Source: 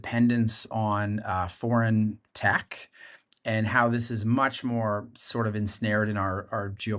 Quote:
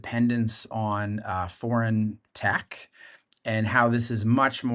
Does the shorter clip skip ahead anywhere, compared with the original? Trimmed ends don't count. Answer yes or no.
no